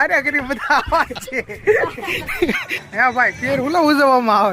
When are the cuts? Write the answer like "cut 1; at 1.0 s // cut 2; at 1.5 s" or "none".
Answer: cut 1; at 2.7 s